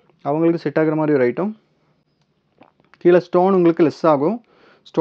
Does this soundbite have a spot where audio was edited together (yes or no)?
no